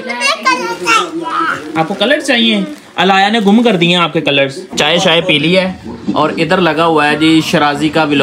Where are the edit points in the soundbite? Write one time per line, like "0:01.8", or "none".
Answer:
0:04.7